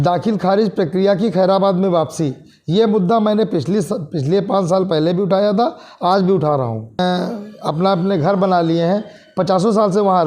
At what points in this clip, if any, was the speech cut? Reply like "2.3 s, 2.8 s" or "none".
7.0 s